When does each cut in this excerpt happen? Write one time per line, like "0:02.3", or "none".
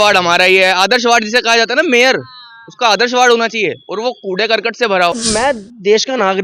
0:05.2